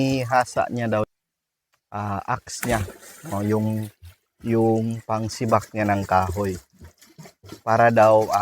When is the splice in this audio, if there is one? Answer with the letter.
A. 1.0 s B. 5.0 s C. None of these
A